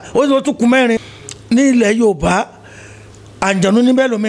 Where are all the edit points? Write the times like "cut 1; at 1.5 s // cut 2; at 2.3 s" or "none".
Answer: cut 1; at 1.1 s